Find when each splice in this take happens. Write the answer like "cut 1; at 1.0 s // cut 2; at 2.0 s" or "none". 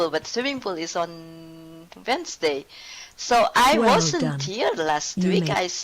cut 1; at 2.6 s